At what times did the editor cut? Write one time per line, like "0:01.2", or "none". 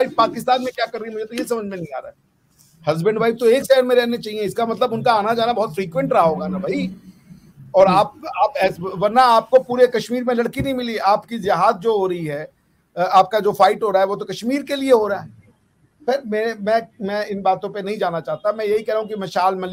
none